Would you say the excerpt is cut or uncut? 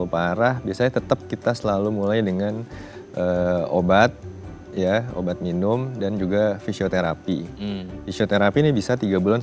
uncut